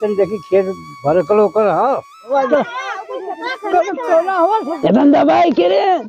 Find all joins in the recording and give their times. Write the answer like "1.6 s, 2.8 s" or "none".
2.3 s, 4.7 s